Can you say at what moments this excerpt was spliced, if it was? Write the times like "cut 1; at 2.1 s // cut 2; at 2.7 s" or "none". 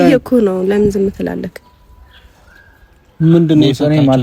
none